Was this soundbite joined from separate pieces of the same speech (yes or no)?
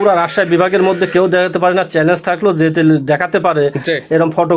no